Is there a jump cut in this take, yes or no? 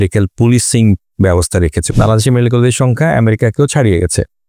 yes